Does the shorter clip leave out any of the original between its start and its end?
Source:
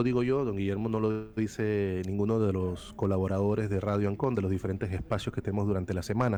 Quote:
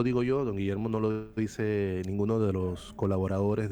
no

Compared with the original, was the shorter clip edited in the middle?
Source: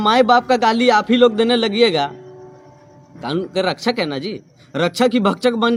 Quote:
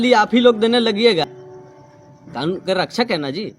yes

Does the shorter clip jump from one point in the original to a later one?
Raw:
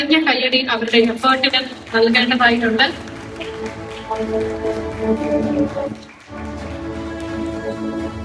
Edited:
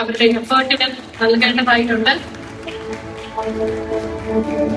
no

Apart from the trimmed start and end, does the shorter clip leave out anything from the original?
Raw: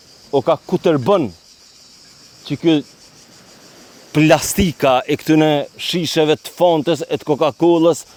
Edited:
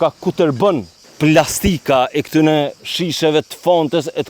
yes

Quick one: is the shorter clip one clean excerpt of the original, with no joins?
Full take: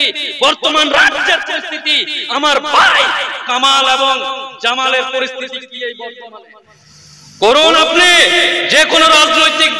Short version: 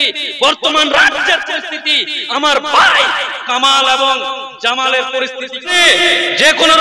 no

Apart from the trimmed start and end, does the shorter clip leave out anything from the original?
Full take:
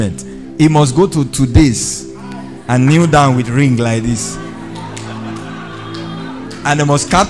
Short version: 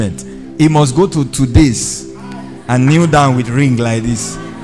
no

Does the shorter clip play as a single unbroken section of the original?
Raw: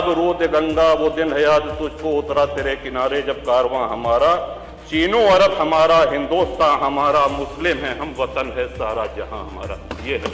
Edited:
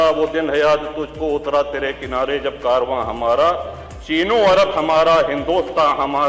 yes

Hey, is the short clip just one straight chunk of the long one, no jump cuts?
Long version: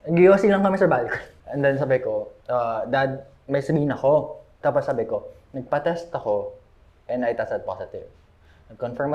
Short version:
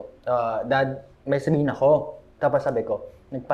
yes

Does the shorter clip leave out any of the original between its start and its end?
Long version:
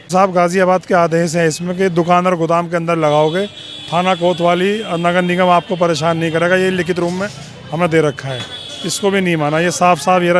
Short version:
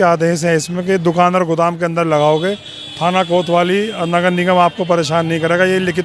no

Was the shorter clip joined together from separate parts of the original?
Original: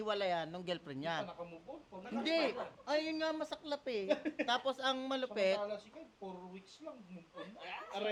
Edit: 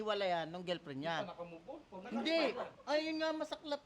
no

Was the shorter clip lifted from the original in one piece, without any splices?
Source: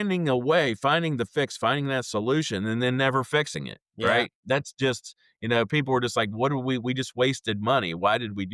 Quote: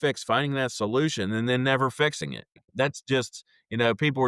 no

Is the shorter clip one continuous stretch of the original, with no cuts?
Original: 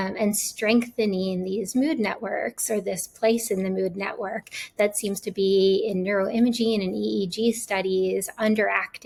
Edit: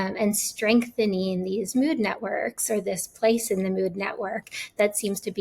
yes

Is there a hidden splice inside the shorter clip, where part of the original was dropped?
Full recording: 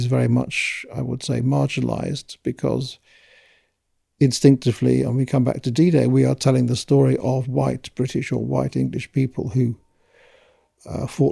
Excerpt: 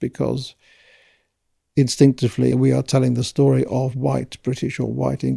yes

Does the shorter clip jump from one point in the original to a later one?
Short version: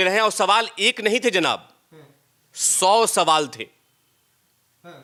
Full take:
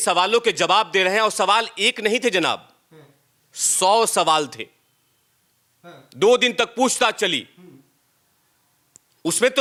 no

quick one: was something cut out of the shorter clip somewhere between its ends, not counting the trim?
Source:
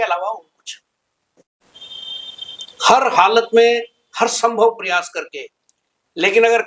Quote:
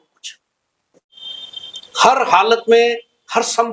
yes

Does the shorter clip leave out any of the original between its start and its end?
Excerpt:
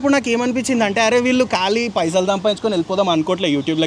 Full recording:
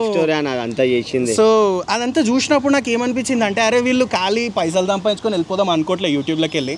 no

